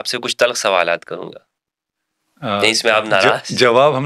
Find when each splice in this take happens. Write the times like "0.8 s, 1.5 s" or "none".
none